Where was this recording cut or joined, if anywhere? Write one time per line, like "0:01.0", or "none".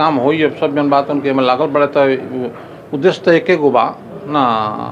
none